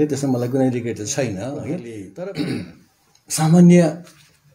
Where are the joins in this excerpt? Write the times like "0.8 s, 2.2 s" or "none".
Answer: 1.9 s